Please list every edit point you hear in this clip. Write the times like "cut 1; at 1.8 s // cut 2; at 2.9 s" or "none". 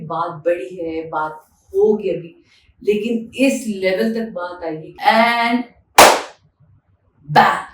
cut 1; at 4.9 s